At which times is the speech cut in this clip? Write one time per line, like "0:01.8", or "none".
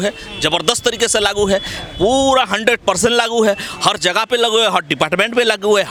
none

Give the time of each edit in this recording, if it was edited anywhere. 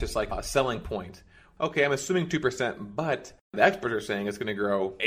0:01.4
0:03.4

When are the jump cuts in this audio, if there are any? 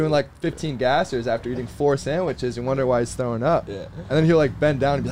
none

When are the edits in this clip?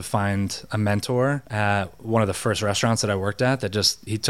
none

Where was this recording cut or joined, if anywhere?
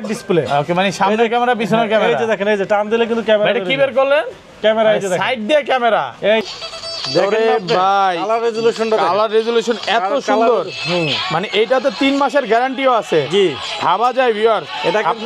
0:06.4

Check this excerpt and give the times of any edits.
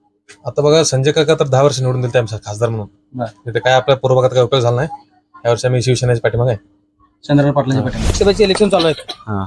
0:08.2

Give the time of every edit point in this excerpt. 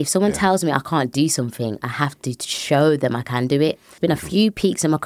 0:03.9

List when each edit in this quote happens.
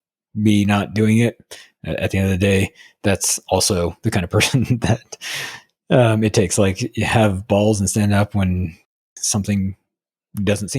0:09.0

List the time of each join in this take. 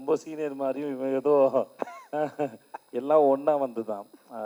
none

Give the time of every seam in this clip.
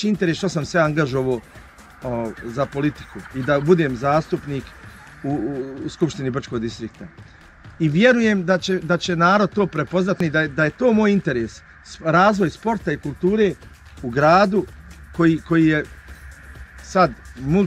none

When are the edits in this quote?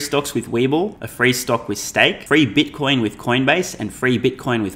0:01.0
0:02.2

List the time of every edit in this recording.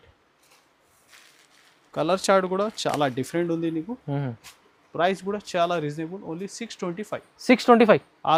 none

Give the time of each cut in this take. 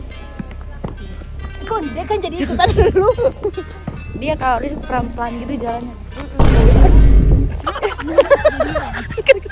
none

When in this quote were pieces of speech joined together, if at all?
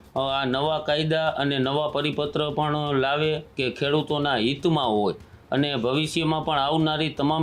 none

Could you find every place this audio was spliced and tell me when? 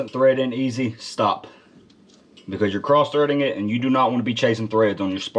none

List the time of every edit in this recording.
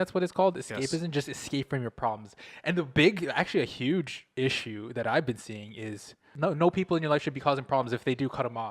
0:06.3

